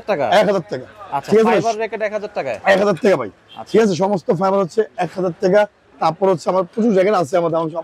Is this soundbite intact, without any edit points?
yes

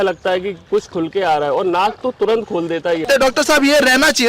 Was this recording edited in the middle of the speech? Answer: yes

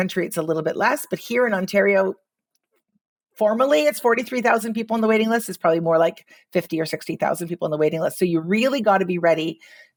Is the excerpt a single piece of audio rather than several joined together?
yes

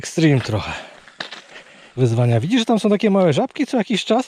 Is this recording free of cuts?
yes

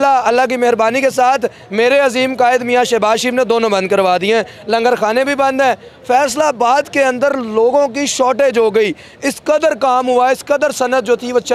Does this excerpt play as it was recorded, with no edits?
yes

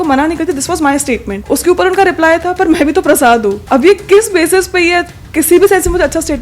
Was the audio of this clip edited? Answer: yes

